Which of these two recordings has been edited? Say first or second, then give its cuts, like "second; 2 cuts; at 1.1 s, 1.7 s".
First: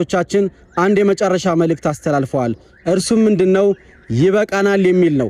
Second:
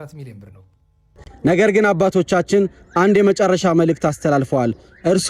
second; 1 cut; at 1.3 s